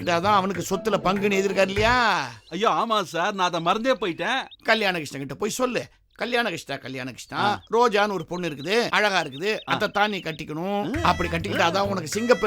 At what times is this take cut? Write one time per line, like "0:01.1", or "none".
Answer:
none